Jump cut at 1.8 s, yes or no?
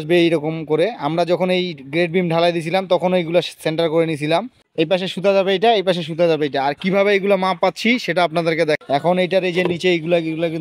no